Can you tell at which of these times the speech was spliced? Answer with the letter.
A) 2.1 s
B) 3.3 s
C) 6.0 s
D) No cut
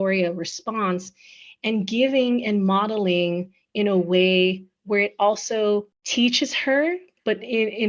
C